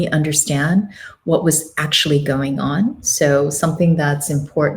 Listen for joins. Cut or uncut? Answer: uncut